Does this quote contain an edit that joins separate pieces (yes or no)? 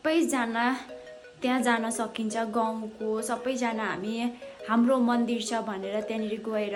no